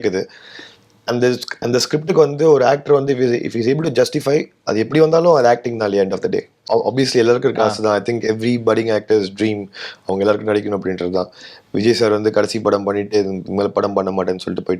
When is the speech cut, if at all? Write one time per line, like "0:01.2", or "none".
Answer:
0:06.6